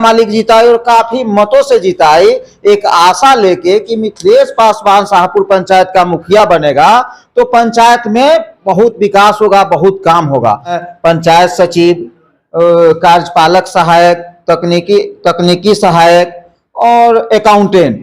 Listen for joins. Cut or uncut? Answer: cut